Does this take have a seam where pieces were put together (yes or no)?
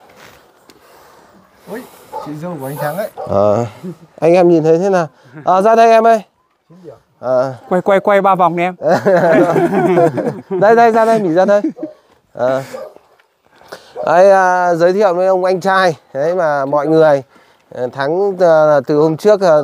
no